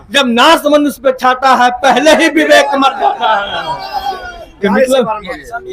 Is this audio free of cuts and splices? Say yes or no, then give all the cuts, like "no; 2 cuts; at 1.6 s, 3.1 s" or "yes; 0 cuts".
yes; 0 cuts